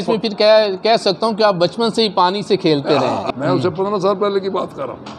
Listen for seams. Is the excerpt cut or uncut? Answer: cut